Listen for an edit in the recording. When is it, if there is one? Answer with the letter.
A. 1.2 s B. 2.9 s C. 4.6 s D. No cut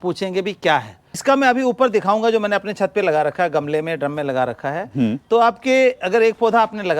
A